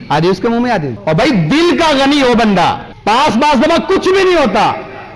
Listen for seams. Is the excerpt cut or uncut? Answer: cut